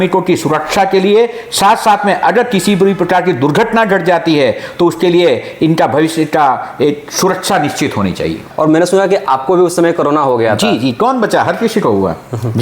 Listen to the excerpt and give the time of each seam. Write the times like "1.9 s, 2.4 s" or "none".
8.4 s